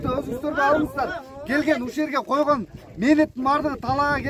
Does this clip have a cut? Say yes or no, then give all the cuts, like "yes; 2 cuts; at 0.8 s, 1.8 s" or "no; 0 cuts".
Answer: no; 0 cuts